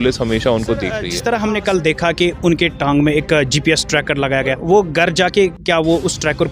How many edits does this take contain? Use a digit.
1